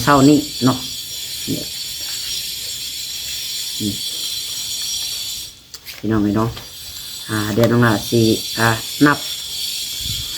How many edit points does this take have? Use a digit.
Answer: 0